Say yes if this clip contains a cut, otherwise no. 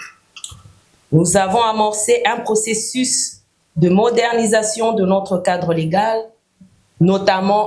no